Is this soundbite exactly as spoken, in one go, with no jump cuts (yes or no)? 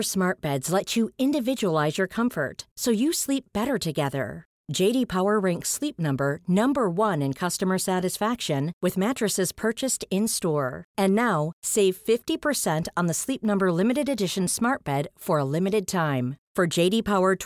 yes